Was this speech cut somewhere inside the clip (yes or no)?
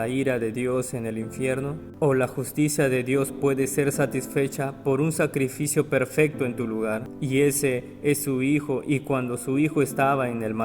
yes